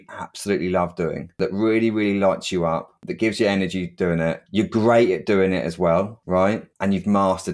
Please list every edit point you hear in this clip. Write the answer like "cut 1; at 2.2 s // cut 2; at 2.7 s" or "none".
none